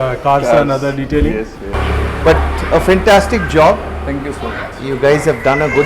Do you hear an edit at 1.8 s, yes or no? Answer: yes